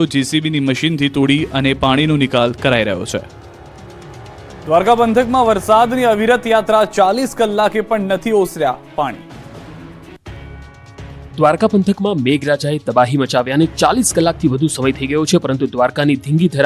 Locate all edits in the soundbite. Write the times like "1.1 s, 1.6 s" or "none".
none

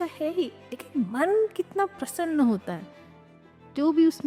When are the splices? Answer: none

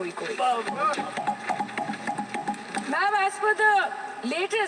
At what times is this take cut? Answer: none

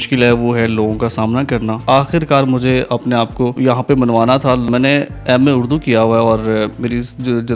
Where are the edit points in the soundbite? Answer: 1.8 s, 3.6 s, 4.7 s

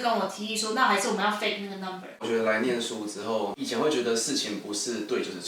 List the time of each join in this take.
2.2 s

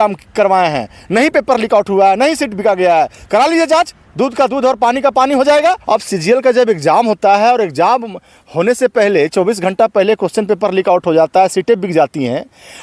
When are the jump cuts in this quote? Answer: 5.8 s

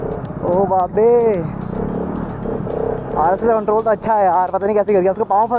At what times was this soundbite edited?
none

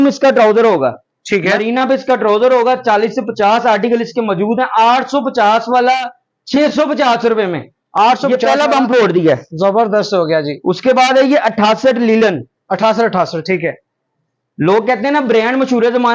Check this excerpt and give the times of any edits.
none

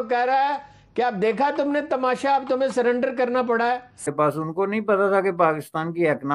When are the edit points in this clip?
3.9 s

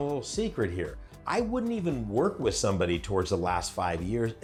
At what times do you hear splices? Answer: none

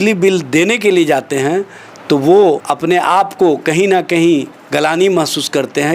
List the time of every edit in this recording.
2.7 s

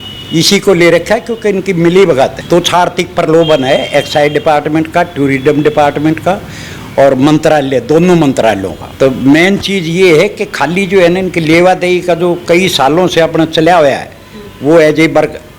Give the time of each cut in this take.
2.4 s, 8.8 s

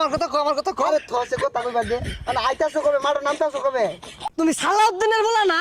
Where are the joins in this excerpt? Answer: 4.1 s

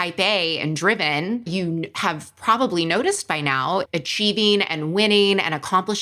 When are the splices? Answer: 3.8 s

